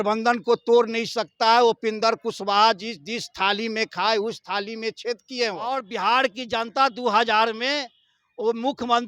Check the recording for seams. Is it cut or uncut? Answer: cut